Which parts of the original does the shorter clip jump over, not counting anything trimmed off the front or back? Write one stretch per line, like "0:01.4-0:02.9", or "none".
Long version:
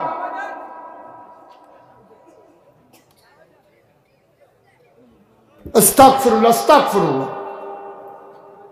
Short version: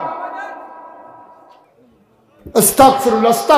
0:01.7-0:04.8